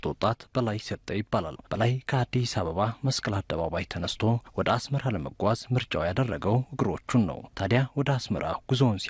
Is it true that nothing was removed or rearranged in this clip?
no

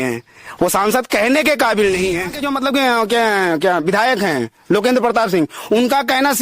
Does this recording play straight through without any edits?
no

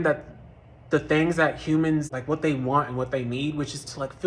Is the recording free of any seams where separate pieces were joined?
no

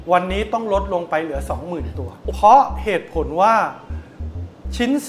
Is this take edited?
yes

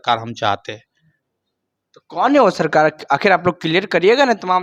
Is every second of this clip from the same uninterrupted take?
yes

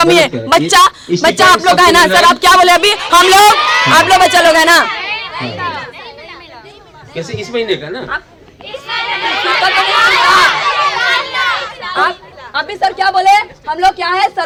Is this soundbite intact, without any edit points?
yes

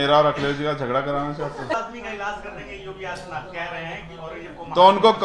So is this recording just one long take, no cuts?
no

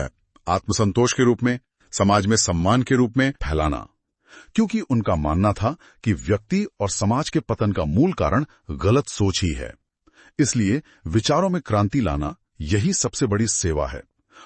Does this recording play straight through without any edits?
no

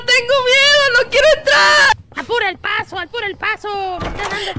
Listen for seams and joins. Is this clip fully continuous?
no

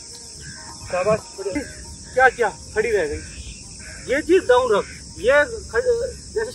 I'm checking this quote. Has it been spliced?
yes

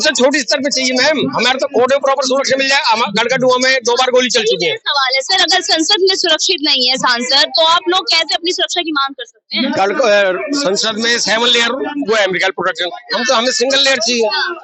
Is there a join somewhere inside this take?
no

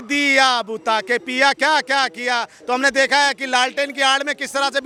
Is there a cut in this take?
no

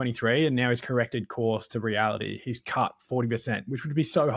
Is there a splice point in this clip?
no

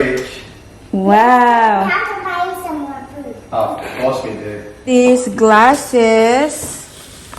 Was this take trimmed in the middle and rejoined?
yes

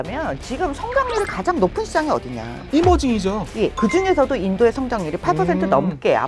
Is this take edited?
yes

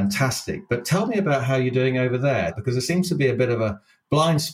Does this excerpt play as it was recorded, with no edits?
no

